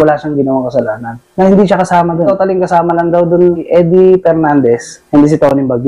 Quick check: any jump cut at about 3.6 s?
yes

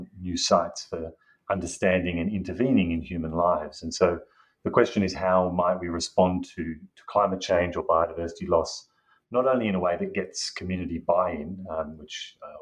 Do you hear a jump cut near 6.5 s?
no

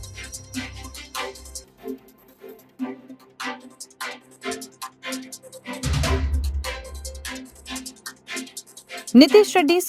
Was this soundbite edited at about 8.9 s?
no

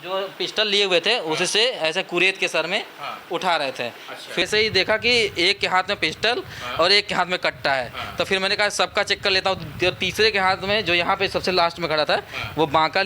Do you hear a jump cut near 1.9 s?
no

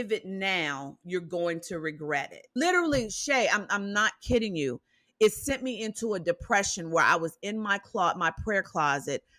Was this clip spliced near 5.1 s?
no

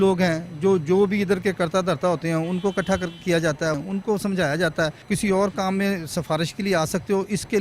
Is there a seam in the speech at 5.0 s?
yes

